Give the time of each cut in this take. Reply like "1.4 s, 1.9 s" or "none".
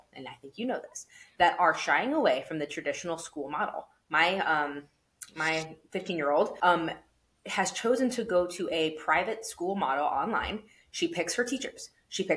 6.5 s